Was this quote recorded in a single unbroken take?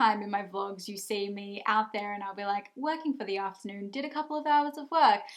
yes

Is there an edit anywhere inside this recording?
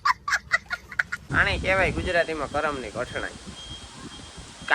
yes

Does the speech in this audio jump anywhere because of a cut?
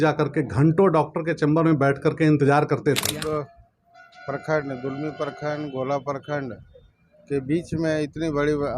yes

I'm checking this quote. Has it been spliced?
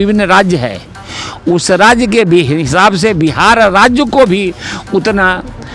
no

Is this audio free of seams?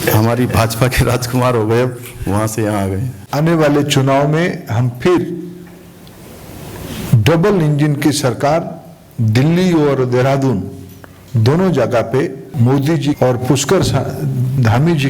no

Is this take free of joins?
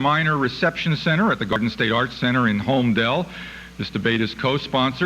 no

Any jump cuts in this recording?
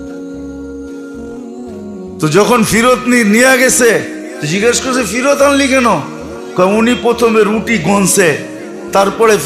yes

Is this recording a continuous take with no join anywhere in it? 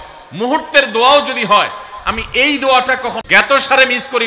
no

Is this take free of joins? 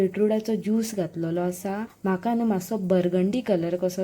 no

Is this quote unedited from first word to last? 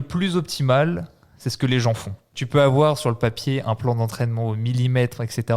no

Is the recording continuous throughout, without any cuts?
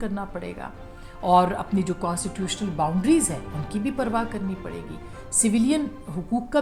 yes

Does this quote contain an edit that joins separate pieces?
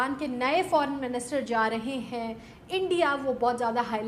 no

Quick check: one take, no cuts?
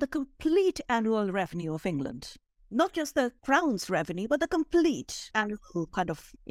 yes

